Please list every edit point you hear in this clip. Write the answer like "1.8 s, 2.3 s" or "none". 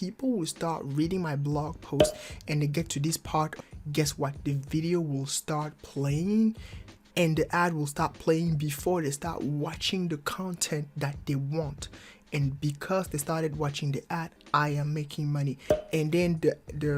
3.6 s